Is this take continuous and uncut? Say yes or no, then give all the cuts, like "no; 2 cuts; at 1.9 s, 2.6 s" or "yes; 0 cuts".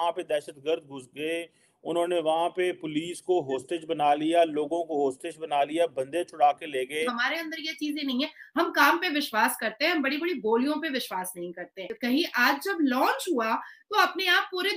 no; 2 cuts; at 7.2 s, 11.9 s